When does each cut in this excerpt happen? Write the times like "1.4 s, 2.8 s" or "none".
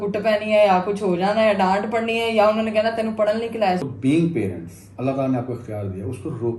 3.8 s